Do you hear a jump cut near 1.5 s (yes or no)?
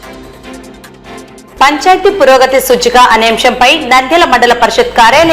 yes